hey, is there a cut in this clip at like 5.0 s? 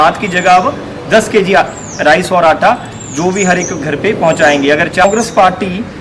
yes; 1 cut; at 5.0 s

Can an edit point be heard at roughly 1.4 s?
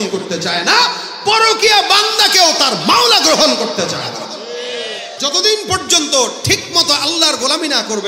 no; 1 cut; at 5.1 s

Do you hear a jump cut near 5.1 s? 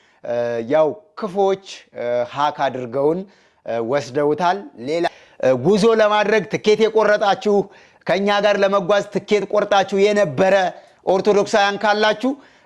yes; 1 cut; at 5.1 s

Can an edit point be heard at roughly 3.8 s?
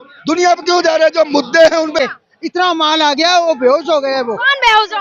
no; 1 cut; at 2.0 s

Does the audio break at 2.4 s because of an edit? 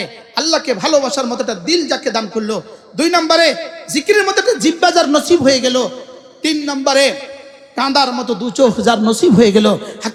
no; 0 cuts

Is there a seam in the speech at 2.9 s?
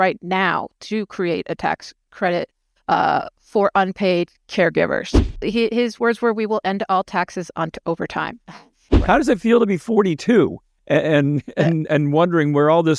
no; 2 cuts; at 5.4 s, 8.8 s

